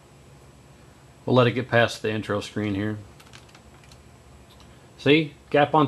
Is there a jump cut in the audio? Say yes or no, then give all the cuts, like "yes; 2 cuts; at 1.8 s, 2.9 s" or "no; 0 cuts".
no; 0 cuts